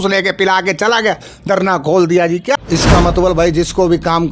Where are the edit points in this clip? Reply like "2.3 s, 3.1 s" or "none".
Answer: 2.6 s